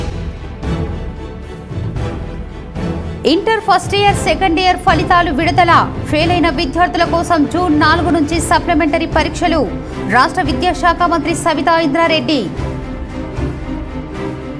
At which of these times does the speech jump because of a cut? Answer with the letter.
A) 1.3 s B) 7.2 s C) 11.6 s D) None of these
A